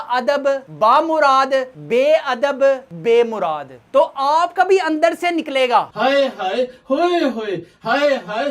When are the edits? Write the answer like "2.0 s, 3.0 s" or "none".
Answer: 3.8 s